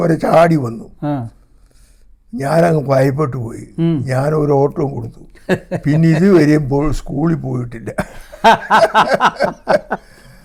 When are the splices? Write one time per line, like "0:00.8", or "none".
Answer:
none